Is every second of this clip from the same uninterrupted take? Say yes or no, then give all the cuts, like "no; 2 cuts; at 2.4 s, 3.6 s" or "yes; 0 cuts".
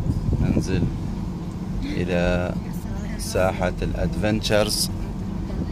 yes; 0 cuts